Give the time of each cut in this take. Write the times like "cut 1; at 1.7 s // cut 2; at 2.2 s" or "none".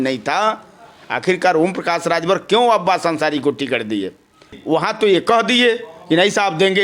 cut 1; at 4.6 s